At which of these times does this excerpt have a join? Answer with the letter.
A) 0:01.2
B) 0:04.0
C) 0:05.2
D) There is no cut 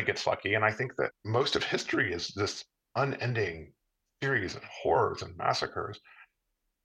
A